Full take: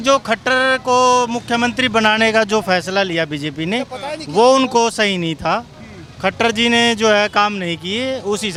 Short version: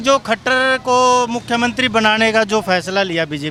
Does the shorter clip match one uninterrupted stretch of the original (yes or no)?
yes